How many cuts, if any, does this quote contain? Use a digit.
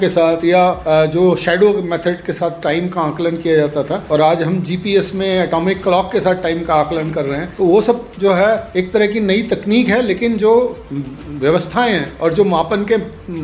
5